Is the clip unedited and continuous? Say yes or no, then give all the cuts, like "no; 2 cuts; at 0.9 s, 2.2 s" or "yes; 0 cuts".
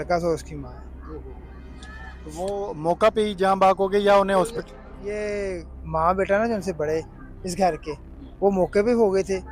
yes; 0 cuts